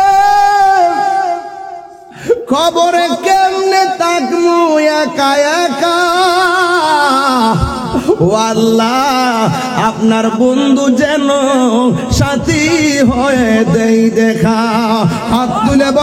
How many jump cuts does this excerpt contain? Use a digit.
0